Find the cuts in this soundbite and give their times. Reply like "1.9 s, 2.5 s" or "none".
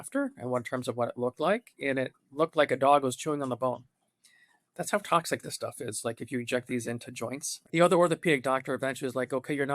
7.5 s